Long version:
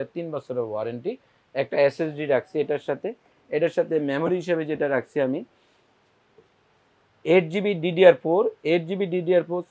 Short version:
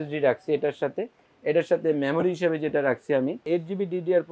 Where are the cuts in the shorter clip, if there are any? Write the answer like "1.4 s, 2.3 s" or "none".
3.4 s